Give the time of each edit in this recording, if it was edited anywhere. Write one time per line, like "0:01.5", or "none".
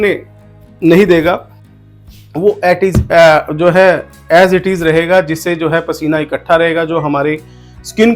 none